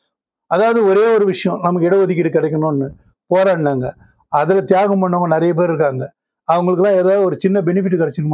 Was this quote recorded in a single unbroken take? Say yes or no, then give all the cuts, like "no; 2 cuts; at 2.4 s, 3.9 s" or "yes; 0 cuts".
yes; 0 cuts